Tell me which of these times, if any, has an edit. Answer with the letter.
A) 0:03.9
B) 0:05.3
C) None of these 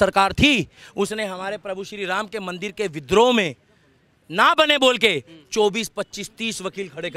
C